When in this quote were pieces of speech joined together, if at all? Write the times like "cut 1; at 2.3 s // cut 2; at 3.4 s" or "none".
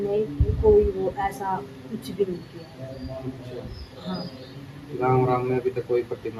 none